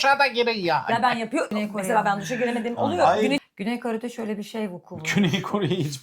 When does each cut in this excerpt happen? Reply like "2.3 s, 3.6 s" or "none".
3.4 s